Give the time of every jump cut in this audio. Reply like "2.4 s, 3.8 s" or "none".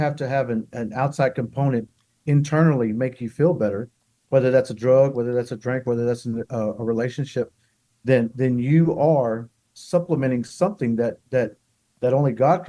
none